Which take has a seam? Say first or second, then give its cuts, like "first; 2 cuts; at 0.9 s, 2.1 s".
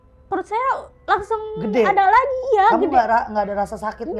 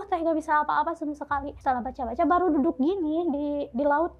second; 1 cut; at 1.5 s